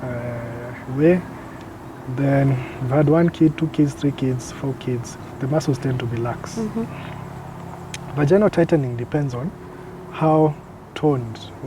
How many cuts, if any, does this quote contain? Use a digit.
0